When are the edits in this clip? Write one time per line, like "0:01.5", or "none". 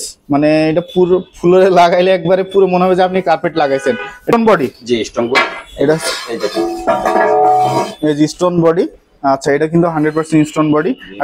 0:04.3

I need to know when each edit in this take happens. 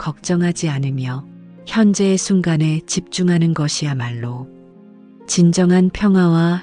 none

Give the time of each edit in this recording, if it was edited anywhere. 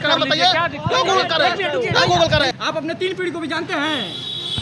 0:02.6

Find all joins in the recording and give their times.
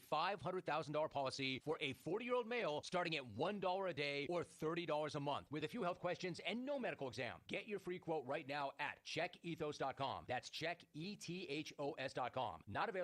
none

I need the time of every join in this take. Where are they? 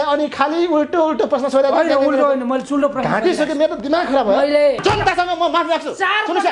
0:04.8

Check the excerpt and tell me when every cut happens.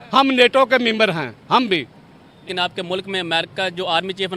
0:02.4

